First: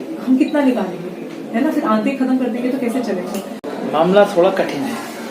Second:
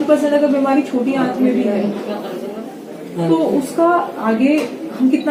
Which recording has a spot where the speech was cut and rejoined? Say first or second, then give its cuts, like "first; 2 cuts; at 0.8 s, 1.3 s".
first; 1 cut; at 3.6 s